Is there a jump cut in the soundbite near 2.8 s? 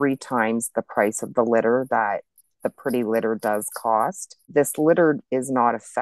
no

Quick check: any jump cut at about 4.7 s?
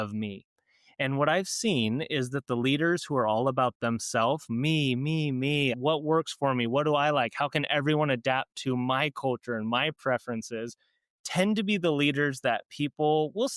no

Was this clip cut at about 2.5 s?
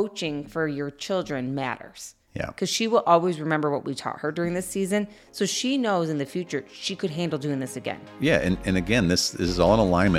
yes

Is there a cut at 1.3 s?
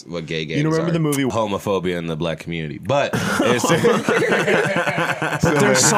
yes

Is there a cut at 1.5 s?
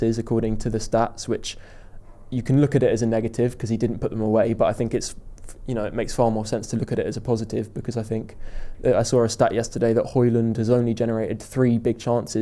no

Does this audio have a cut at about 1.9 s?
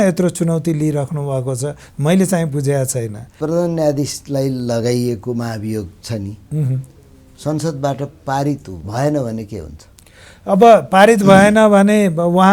no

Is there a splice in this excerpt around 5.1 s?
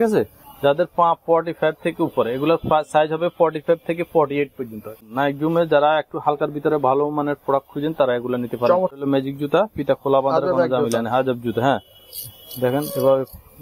yes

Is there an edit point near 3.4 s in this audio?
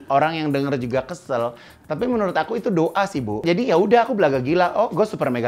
yes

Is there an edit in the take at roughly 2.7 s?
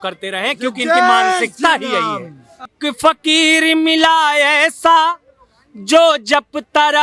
yes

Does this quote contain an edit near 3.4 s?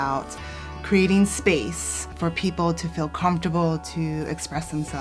no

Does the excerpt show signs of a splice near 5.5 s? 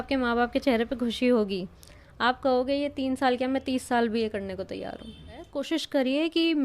yes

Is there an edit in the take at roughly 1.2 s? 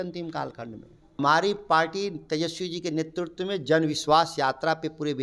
yes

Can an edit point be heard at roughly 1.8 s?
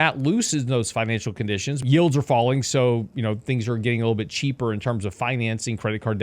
yes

